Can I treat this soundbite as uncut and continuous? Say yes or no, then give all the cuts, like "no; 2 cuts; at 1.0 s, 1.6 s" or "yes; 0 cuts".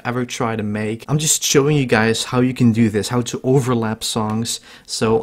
no; 1 cut; at 1.0 s